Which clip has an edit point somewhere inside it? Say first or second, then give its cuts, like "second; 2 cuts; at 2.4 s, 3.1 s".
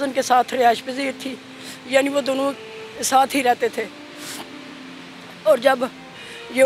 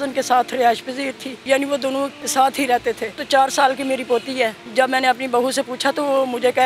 second; 4 cuts; at 1.3 s, 2.2 s, 3.2 s, 4.6 s